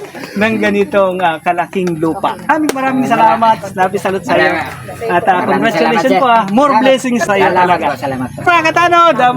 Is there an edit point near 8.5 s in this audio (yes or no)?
yes